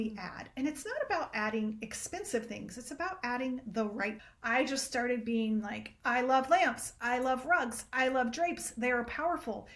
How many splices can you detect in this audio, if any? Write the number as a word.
one